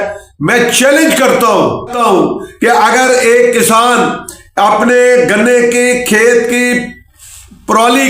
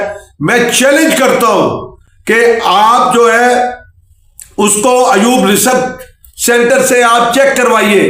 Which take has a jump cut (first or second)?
first